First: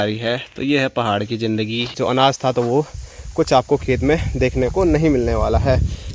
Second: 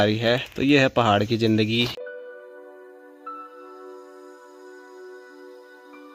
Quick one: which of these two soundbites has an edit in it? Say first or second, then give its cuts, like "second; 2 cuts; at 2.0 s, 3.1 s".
first; 1 cut; at 1.9 s